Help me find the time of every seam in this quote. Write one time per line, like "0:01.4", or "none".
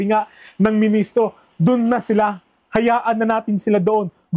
none